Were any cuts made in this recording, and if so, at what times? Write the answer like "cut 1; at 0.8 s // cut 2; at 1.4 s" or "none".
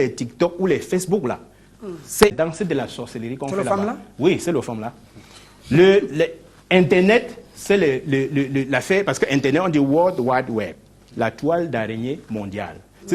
cut 1; at 2.3 s